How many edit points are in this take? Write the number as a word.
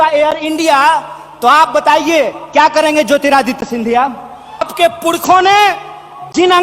one